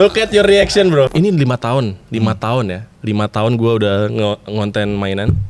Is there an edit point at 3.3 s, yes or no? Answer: no